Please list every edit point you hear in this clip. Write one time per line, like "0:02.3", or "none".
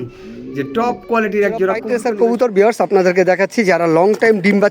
0:01.9